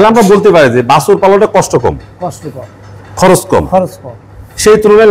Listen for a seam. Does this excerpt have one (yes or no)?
no